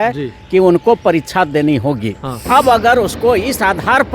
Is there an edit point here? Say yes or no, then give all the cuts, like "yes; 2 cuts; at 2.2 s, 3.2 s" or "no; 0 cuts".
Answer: yes; 1 cut; at 2.4 s